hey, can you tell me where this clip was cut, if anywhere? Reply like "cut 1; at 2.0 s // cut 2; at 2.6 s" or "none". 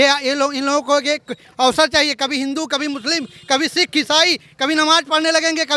none